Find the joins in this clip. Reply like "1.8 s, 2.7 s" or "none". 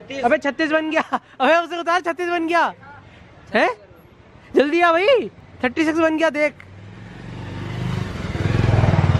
none